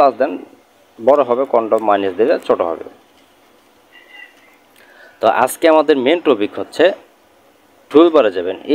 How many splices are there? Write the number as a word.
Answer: zero